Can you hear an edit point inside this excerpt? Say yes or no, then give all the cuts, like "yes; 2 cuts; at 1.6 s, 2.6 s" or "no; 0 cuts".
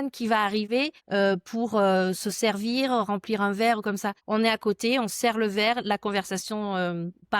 yes; 2 cuts; at 1.0 s, 4.1 s